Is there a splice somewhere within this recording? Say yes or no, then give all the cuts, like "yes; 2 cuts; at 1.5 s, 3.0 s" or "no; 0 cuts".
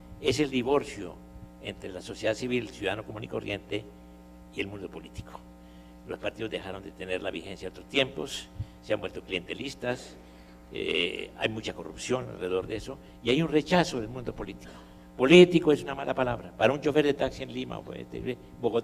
no; 0 cuts